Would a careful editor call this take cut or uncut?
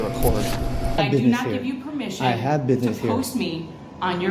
cut